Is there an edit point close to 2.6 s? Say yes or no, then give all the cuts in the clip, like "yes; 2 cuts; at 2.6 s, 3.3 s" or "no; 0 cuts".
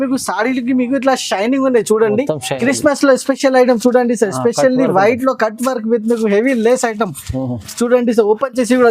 yes; 1 cut; at 2.6 s